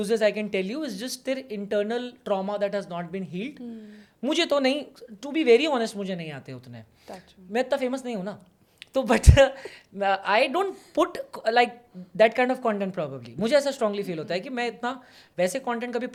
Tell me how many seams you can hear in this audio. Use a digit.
0